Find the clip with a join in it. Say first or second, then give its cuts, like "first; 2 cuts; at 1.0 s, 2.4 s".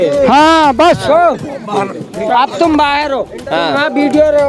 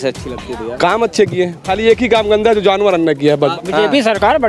second; 2 cuts; at 1.6 s, 3.6 s